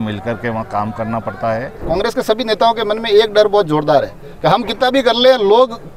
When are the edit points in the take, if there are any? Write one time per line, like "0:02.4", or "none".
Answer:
0:01.7

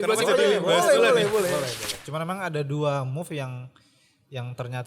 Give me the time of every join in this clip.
0:01.9

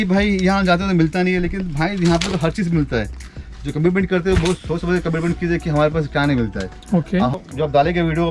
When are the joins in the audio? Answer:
0:07.4

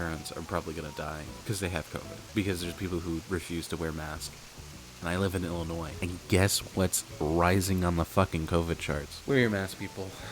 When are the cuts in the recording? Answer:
0:01.4
0:02.2
0:05.9
0:09.1

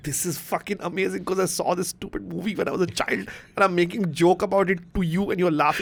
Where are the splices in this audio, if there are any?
none

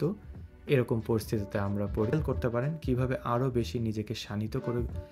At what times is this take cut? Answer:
0:02.1

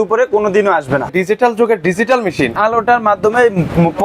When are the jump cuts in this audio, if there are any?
0:01.1
0:02.6

